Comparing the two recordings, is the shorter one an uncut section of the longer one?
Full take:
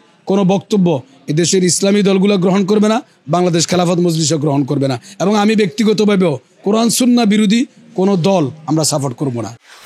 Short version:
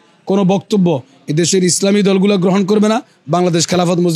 yes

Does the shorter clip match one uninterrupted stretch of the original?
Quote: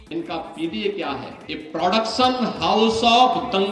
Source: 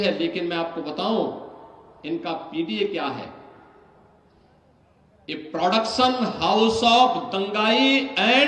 no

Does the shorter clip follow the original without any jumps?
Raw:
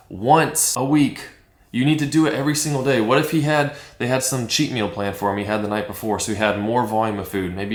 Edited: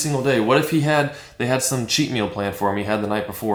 yes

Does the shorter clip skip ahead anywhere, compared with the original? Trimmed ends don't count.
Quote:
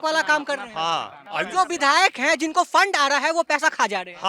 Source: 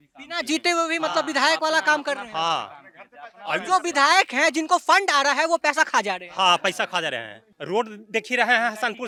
yes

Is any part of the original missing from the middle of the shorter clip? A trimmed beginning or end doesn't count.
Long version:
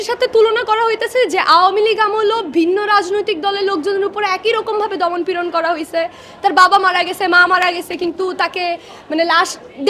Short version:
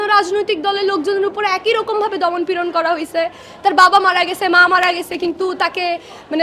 no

